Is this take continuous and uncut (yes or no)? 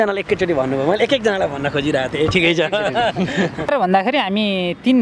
no